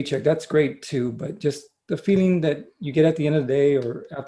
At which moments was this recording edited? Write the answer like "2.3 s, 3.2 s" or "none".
none